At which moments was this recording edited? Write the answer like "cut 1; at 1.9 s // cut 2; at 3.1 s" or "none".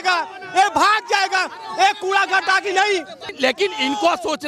cut 1; at 3.3 s

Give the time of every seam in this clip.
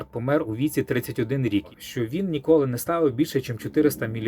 cut 1; at 1.7 s

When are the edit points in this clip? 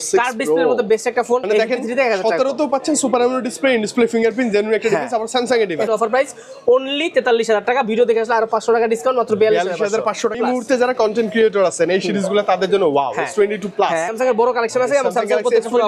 cut 1; at 1.4 s // cut 2; at 5.9 s // cut 3; at 10.4 s // cut 4; at 14.1 s

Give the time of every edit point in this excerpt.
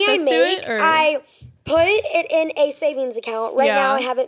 none

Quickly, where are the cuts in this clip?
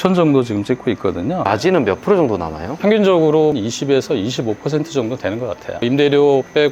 cut 1; at 2.8 s // cut 2; at 5.7 s

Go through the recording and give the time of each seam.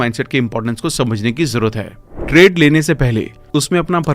cut 1; at 2.0 s

